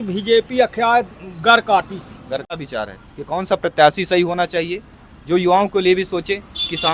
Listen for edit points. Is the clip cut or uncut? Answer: cut